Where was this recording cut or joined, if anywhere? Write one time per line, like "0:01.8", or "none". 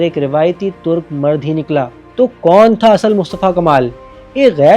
0:02.0